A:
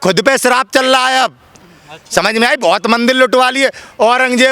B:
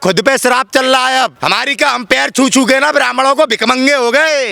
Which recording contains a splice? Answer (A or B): B